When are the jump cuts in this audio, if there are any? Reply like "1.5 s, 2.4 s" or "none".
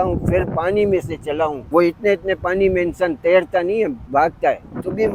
1.6 s, 4.3 s